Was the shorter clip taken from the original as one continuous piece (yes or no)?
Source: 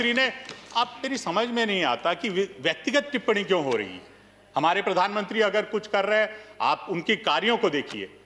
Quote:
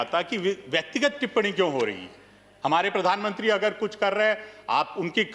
yes